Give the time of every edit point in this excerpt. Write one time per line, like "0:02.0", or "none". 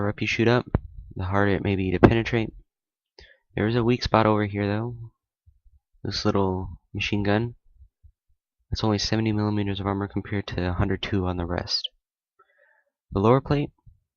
0:05.1